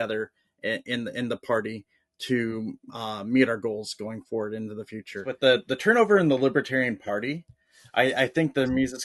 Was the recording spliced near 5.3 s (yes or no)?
yes